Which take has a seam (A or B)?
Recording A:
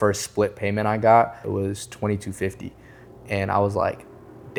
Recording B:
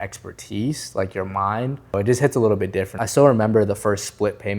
B